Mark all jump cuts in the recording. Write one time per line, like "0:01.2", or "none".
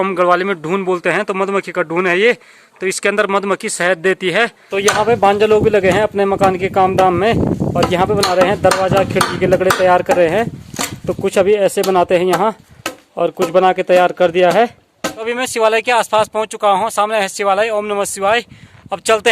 0:04.6
0:15.1